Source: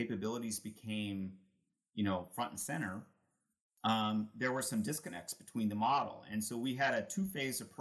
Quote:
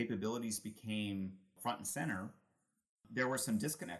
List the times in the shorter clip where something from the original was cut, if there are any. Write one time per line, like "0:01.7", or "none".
0:01.6
0:03.1